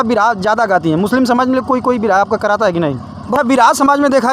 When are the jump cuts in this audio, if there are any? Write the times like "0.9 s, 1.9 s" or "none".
3.3 s